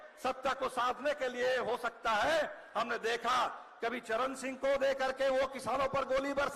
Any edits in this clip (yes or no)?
no